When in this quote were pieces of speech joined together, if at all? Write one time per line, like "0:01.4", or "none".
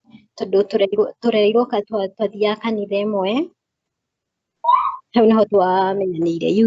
0:04.6